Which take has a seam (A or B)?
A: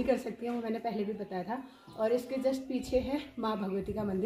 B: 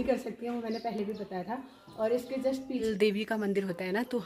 B